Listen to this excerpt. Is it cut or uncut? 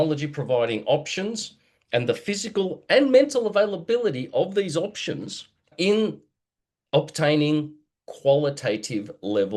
uncut